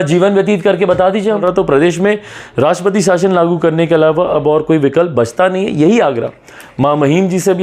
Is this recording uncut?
no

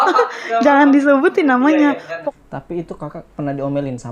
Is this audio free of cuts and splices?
no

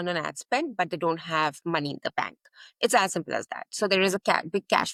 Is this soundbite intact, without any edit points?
yes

